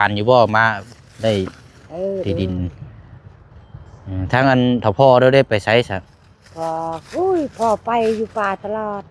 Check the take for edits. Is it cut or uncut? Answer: uncut